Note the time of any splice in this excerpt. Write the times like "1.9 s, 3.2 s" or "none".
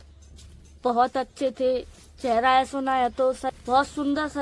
3.5 s